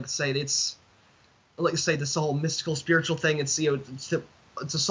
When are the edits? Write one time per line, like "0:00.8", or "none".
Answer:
none